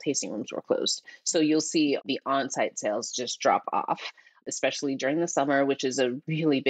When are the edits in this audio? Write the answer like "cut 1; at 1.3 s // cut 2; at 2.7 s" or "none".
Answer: cut 1; at 1.0 s // cut 2; at 2.0 s